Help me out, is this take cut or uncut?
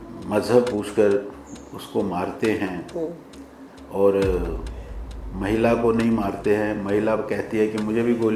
uncut